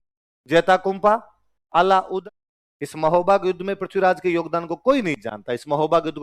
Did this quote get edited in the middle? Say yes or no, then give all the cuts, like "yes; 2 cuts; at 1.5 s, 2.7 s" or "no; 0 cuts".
yes; 1 cut; at 2.2 s